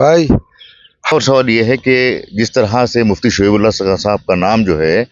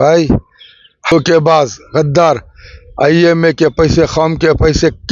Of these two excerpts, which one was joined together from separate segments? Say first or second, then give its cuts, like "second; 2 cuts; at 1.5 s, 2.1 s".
second; 1 cut; at 1.1 s